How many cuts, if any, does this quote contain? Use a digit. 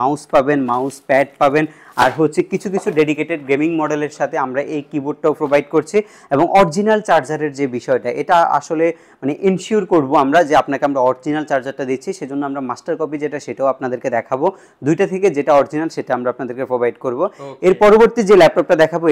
0